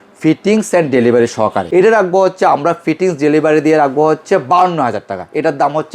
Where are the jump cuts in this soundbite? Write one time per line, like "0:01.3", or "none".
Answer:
0:01.6